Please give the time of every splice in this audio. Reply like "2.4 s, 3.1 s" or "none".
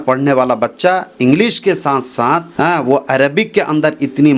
2.5 s